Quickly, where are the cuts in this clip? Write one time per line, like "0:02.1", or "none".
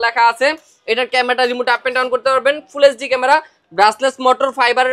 none